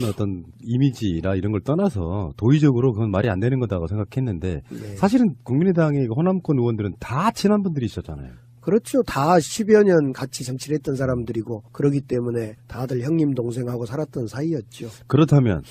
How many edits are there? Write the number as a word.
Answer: one